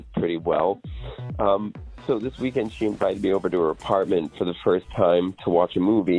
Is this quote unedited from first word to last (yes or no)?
yes